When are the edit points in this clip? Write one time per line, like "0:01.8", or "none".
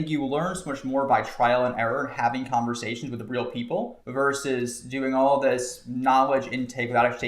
0:04.0